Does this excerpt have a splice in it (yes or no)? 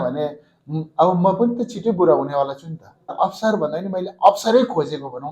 yes